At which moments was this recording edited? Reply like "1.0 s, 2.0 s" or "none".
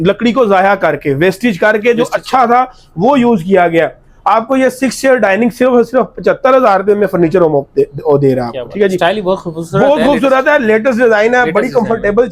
none